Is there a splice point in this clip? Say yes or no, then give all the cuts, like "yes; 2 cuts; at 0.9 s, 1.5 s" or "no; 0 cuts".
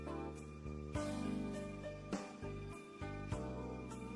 yes; 1 cut; at 1.3 s